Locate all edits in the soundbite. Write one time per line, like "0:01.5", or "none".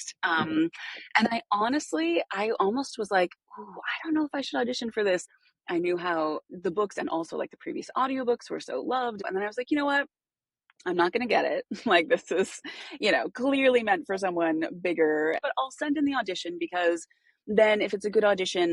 0:05.2
0:09.2
0:15.4